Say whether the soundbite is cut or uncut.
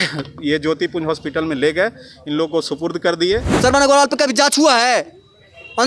cut